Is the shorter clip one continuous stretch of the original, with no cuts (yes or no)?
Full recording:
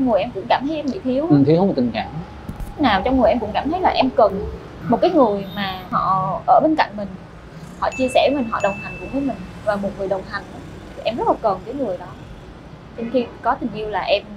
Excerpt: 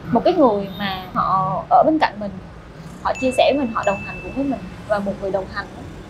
yes